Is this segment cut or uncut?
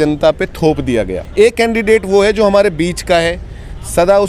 cut